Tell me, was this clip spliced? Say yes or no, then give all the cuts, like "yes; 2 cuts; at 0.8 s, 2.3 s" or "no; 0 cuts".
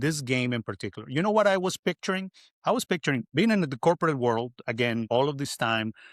yes; 1 cut; at 5.1 s